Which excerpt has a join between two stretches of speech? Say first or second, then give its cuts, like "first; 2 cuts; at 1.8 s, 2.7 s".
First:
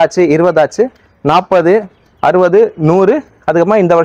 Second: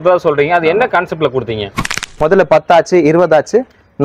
second; 1 cut; at 1.8 s